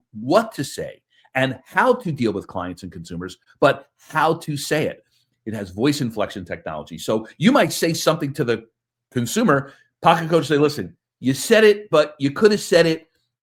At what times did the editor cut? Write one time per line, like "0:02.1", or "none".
none